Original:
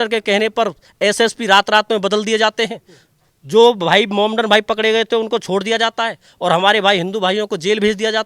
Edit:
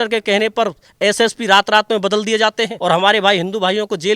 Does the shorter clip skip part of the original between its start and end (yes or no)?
yes